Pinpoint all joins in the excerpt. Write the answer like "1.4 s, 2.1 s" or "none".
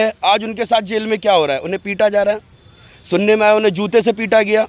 none

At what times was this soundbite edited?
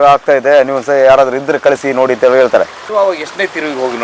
2.8 s

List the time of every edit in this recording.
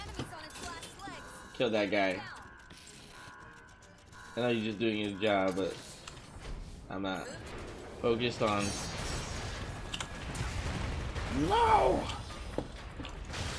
7.5 s

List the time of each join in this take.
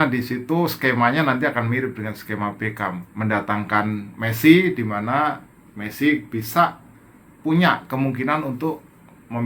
3.1 s

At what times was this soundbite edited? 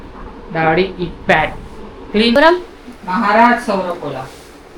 2.4 s

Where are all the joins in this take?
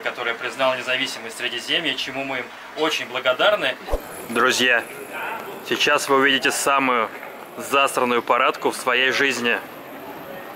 4.0 s

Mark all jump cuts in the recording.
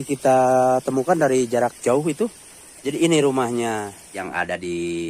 4.0 s

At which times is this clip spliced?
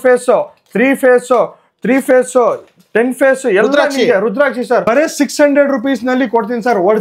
4.8 s

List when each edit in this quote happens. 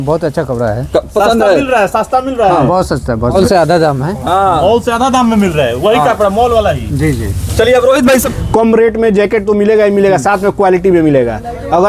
3.3 s, 8.3 s

